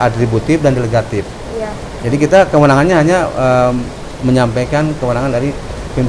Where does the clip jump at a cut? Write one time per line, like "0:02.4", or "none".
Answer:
none